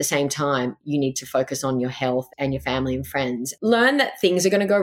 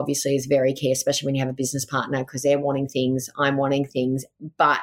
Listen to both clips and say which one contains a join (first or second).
first